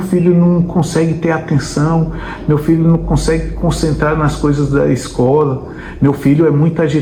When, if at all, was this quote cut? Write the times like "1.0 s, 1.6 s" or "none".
none

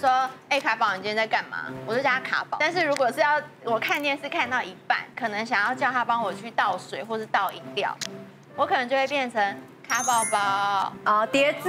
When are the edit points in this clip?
none

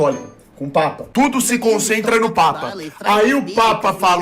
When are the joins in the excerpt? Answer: 1.0 s

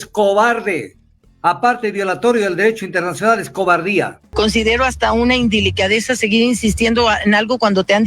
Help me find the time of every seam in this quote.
4.2 s

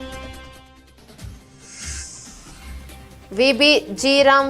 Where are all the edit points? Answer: none

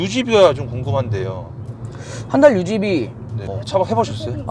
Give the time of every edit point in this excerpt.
3.6 s

